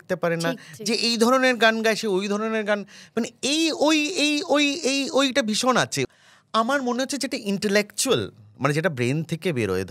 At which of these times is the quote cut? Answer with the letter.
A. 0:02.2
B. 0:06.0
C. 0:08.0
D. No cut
B